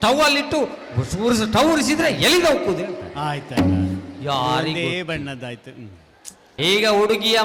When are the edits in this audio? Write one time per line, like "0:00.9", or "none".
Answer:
0:06.5